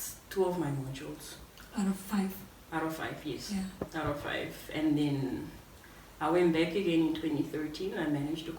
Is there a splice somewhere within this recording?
no; 0 cuts

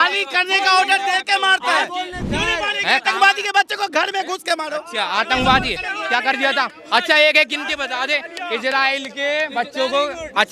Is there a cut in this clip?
yes; 1 cut; at 2.2 s

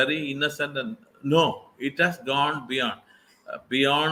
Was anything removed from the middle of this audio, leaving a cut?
no; 0 cuts

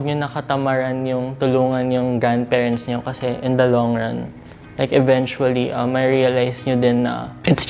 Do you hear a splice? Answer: no; 0 cuts

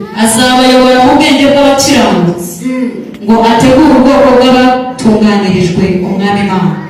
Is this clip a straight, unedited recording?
yes; 0 cuts

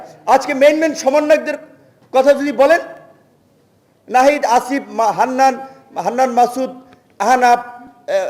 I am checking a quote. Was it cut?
no; 0 cuts

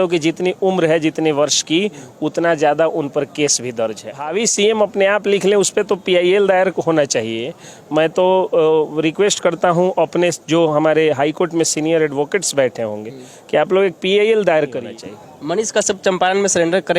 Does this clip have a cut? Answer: yes; 2 cuts; at 4.2 s, 14.9 s

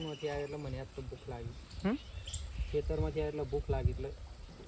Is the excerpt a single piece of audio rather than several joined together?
yes; 0 cuts

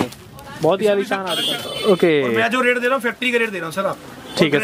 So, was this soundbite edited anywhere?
yes; 1 cut; at 1.6 s

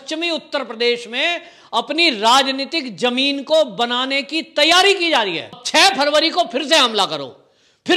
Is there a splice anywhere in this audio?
yes; 1 cut; at 5.5 s

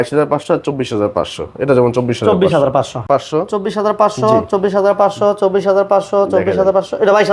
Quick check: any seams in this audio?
yes; 1 cut; at 3.1 s

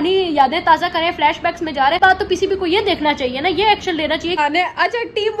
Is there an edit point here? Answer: yes; 2 cuts; at 2.0 s, 4.4 s

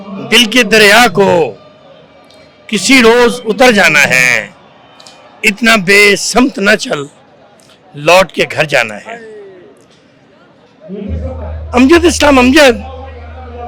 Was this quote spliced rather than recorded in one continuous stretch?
no; 0 cuts

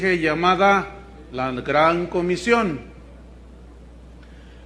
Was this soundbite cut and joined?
no; 0 cuts

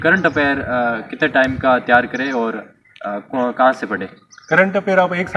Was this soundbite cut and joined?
no; 0 cuts

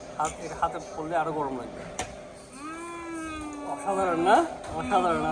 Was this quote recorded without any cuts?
yes; 0 cuts

